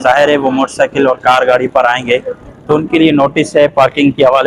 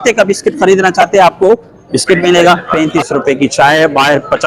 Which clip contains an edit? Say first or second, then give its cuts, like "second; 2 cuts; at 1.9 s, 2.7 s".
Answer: second; 1 cut; at 2.7 s